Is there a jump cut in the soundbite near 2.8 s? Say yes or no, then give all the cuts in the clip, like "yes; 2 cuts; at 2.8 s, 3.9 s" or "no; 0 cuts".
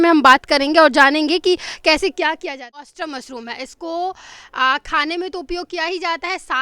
yes; 1 cut; at 2.8 s